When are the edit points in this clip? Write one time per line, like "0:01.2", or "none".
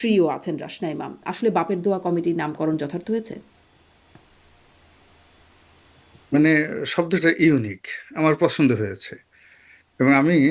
none